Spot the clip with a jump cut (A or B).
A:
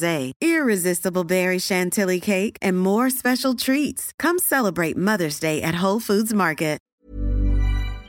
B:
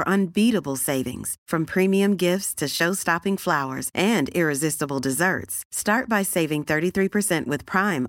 A